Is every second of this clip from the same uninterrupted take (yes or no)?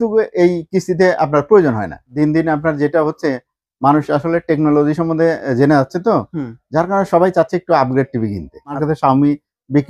no